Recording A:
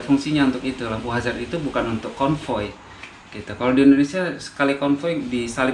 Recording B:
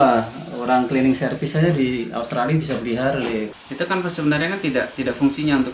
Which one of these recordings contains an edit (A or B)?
B